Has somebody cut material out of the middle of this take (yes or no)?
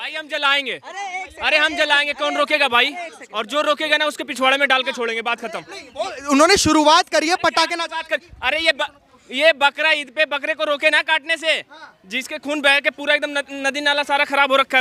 no